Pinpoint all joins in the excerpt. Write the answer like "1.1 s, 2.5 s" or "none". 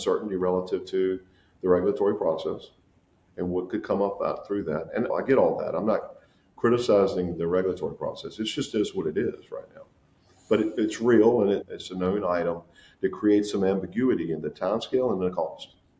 11.6 s